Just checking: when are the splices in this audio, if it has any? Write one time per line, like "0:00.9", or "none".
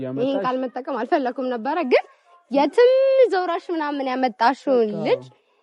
none